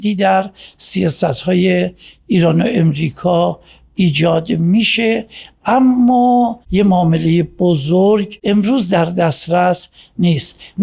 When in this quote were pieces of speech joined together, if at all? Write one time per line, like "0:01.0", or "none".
0:06.6
0:08.3